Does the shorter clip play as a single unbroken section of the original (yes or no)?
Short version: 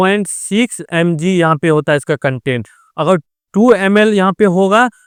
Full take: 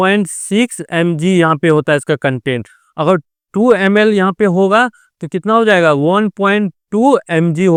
yes